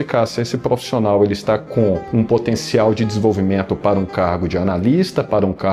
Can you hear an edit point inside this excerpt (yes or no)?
no